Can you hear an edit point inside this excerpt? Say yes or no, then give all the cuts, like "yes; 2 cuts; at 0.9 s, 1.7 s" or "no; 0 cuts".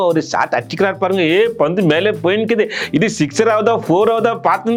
no; 0 cuts